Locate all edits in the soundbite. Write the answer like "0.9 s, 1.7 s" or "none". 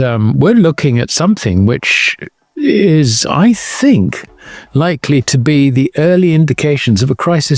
none